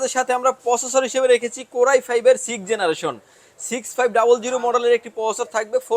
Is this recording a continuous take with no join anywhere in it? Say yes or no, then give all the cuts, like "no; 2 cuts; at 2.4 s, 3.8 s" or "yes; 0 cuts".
yes; 0 cuts